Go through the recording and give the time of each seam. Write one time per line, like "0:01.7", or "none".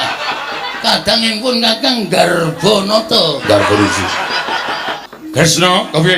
0:04.8